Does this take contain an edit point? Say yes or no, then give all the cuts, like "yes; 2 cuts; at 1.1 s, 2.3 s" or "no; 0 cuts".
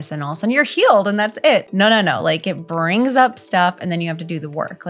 yes; 1 cut; at 1.7 s